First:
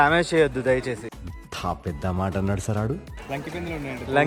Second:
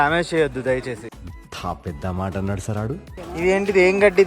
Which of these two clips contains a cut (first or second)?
second